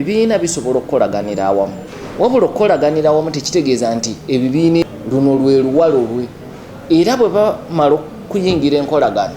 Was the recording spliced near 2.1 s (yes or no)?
no